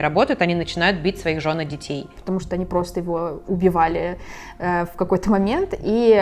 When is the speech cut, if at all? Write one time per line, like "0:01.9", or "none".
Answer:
0:02.1